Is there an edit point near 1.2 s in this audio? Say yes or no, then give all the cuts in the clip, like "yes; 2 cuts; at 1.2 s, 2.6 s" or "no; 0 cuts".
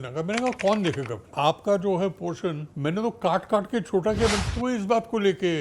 yes; 3 cuts; at 1.2 s, 2.7 s, 4.5 s